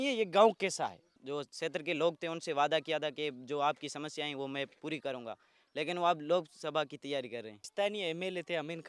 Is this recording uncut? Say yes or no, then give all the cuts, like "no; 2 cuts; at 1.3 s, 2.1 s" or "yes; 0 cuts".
no; 2 cuts; at 1.1 s, 7.6 s